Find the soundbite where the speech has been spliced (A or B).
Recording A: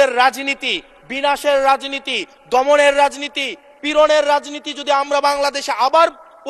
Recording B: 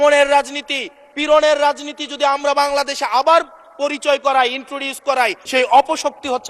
B